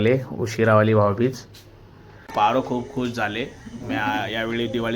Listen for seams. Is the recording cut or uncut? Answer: cut